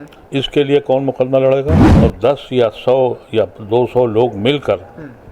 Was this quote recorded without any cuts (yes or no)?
no